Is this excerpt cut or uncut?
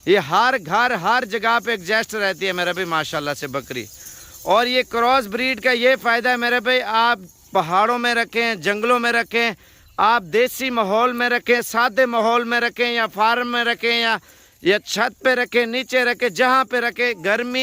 uncut